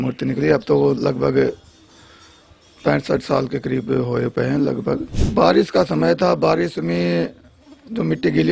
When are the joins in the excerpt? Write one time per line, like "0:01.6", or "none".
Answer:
0:05.1

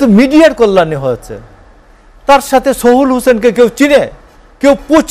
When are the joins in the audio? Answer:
none

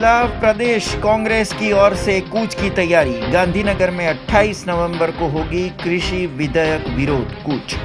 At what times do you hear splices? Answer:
none

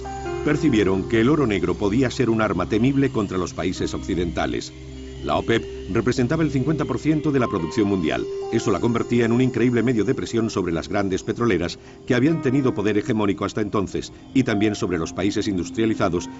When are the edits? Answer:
0:05.8

